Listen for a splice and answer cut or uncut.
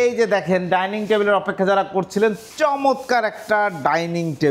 uncut